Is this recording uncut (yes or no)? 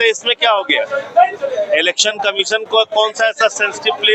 yes